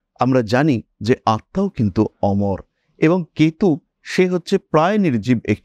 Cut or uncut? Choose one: uncut